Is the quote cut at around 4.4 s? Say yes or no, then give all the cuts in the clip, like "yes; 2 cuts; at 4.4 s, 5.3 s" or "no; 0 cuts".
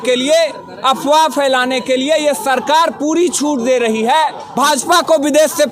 yes; 1 cut; at 4.4 s